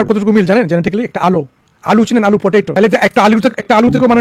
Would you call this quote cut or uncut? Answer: uncut